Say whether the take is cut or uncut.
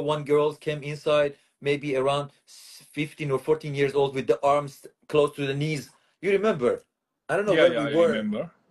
uncut